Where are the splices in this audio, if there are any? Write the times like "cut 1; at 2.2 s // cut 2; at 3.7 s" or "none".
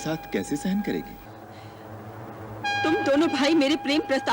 cut 1; at 1.3 s